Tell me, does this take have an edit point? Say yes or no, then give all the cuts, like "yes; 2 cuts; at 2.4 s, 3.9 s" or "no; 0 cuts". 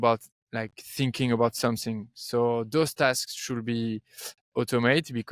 no; 0 cuts